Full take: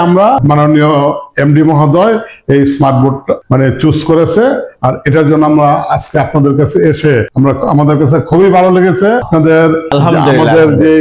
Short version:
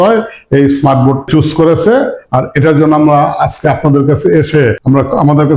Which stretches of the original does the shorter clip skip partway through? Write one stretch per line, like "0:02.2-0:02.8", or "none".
0:03.2-0:03.8